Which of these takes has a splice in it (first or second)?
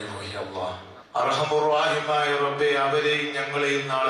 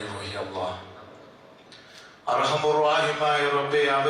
first